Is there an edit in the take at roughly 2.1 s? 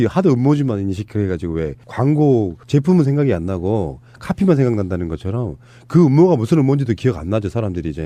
no; 0 cuts

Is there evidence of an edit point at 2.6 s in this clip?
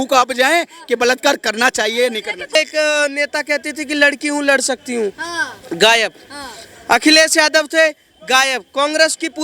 yes; 1 cut; at 2.6 s

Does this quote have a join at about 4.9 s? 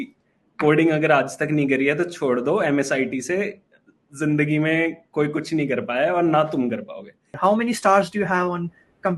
no; 1 cut; at 7.4 s

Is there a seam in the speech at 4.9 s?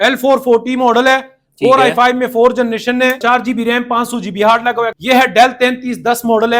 yes; 2 cuts; at 3.2 s, 4.9 s

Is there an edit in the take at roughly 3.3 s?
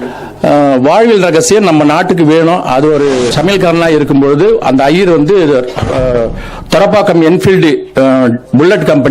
yes; 1 cut; at 3.3 s

